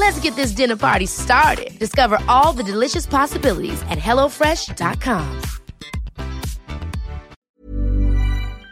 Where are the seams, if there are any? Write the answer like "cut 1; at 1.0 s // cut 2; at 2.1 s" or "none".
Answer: cut 1; at 7.3 s